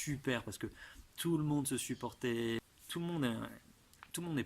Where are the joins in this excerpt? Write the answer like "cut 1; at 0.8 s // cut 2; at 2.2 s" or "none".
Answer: cut 1; at 2.6 s